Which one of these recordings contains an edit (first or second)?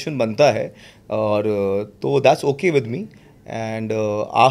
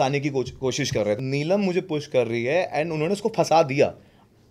second